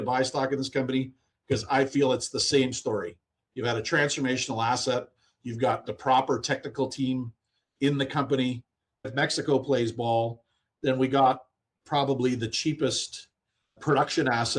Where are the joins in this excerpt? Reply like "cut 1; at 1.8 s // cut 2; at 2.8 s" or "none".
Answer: cut 1; at 9.1 s // cut 2; at 13.8 s